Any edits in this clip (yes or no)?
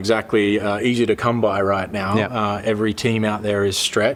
no